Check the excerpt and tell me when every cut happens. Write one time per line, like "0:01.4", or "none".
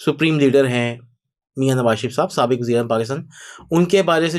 none